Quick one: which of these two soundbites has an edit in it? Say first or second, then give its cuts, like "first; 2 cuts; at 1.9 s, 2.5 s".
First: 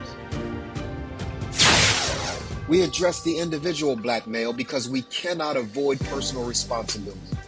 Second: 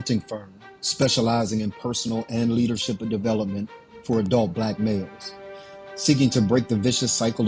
second; 1 cut; at 6.5 s